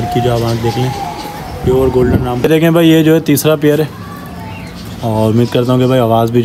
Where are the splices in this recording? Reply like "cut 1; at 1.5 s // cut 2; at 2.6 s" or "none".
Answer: cut 1; at 2.4 s

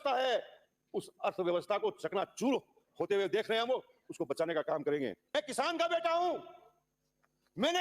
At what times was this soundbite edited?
cut 1; at 5.4 s

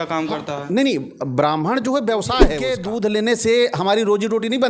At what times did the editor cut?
cut 1; at 2.7 s

